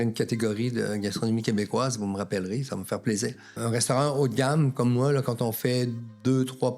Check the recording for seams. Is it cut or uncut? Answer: cut